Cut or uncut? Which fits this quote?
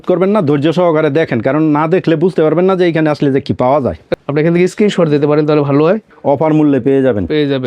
cut